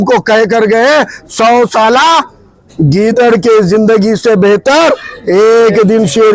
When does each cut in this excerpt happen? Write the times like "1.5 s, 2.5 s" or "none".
none